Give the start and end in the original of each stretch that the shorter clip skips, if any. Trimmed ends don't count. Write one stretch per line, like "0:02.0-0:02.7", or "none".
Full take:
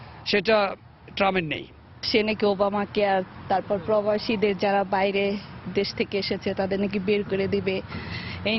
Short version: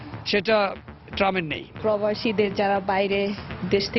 0:01.8-0:03.8